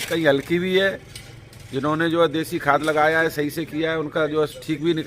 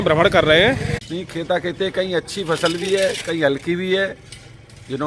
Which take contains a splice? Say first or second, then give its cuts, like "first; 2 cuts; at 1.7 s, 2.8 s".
second; 1 cut; at 0.9 s